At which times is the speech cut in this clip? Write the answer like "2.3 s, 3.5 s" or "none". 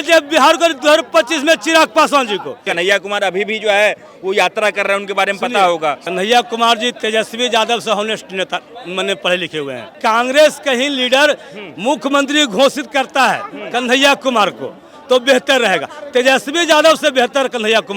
2.7 s, 6.0 s, 10.0 s